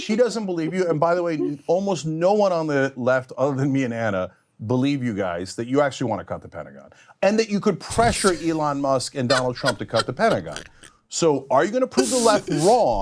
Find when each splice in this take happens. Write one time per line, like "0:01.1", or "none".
none